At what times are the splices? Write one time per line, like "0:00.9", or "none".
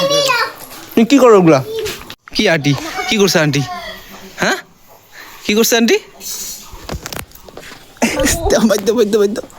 0:02.0

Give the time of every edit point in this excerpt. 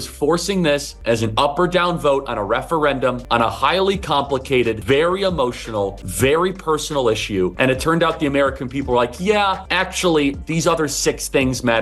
0:00.9
0:03.5
0:04.8
0:06.0
0:07.5
0:09.6

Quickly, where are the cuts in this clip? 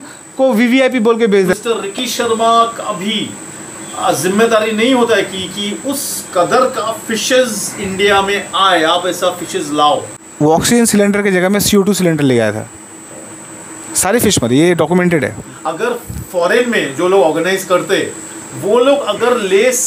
0:01.5
0:10.2
0:15.5

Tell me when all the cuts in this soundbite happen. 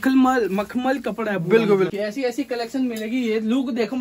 0:01.9

